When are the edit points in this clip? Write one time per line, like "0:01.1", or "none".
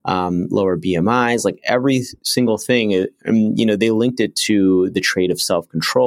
none